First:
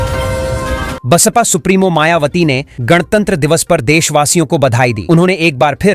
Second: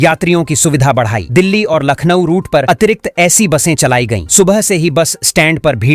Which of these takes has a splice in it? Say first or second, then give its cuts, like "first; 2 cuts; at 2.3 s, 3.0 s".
first; 1 cut; at 0.9 s